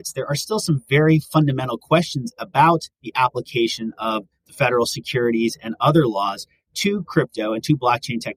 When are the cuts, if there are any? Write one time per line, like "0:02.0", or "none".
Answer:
none